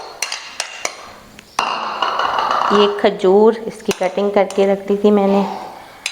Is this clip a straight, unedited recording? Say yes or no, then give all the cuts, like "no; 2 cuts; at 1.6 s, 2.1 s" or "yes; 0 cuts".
yes; 0 cuts